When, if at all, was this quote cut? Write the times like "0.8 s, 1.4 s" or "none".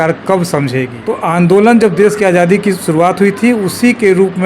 1.0 s